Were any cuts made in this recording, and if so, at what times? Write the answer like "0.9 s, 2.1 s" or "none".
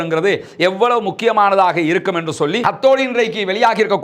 2.6 s